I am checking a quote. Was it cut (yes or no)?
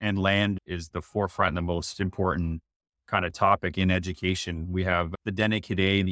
yes